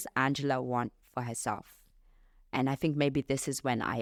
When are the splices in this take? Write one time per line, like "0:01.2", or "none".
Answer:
none